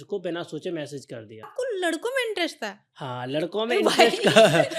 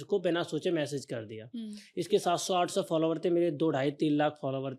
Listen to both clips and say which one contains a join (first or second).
first